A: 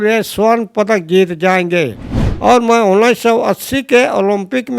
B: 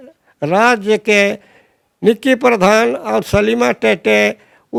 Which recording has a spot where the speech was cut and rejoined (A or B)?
A